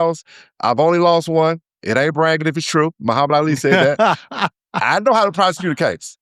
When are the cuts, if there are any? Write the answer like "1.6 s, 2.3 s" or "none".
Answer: 3.9 s